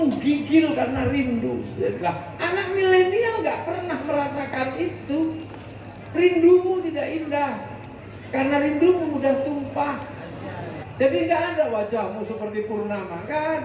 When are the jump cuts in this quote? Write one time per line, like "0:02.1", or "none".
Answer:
0:02.0
0:10.8